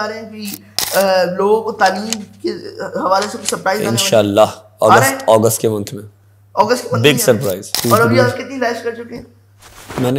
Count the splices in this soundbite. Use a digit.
1